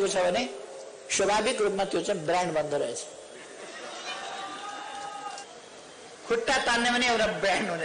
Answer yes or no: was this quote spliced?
yes